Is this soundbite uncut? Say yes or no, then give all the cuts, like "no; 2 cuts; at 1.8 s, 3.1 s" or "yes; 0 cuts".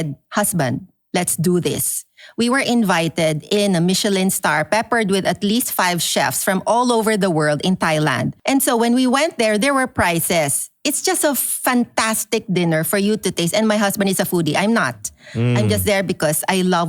no; 1 cut; at 8.3 s